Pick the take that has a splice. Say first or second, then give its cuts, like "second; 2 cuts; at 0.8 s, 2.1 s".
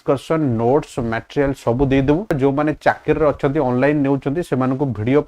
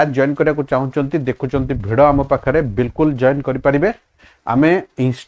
first; 1 cut; at 2.4 s